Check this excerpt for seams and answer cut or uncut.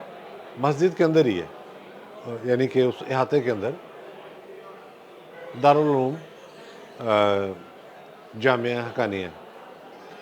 uncut